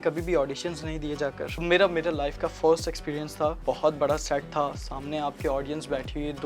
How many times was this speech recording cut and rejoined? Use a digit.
2